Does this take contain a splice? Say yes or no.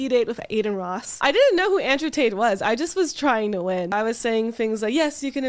yes